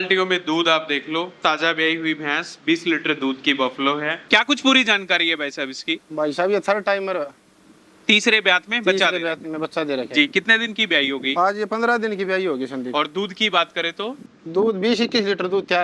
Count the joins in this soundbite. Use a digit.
1